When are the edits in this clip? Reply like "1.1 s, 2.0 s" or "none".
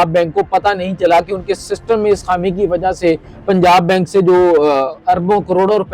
none